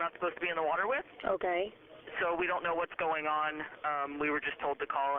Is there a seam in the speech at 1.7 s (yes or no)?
yes